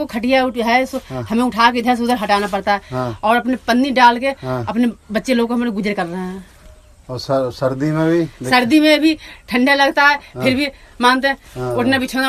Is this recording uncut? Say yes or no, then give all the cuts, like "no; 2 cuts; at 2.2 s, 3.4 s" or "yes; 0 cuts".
yes; 0 cuts